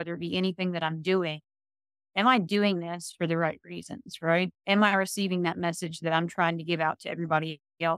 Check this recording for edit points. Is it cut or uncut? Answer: uncut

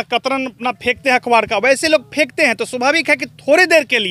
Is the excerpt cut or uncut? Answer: uncut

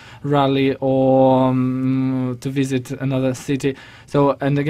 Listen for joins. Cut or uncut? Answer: uncut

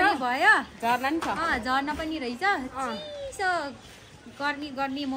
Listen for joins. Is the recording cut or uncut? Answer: uncut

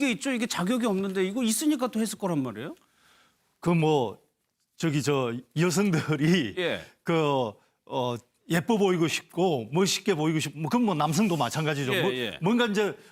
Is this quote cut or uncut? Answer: uncut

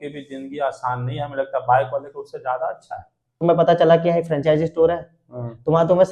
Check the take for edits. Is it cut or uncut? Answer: cut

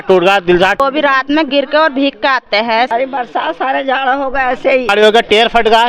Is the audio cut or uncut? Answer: cut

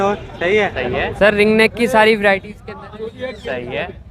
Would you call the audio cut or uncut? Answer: cut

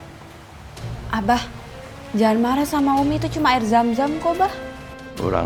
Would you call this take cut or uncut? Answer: uncut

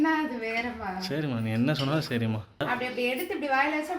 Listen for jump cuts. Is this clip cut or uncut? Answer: cut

